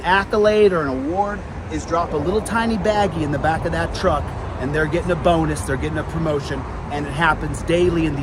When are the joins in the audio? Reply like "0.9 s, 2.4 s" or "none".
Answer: none